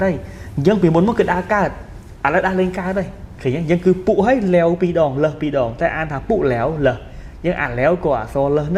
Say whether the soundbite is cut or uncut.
uncut